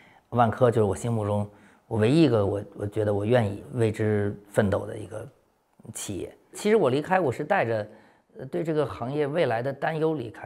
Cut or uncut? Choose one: cut